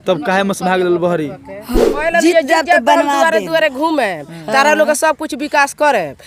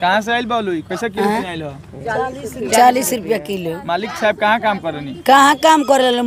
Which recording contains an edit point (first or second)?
first